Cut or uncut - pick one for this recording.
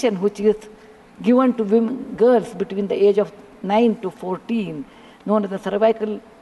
uncut